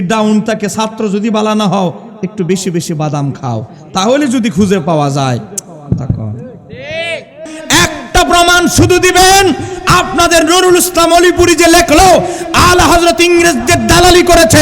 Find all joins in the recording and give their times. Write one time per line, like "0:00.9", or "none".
0:07.5